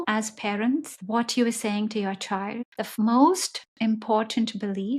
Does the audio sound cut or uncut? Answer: cut